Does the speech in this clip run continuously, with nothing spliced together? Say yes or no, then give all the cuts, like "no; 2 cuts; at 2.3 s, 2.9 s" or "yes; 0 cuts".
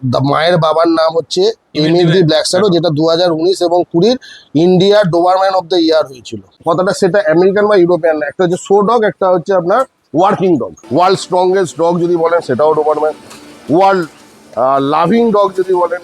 no; 2 cuts; at 6.6 s, 10.8 s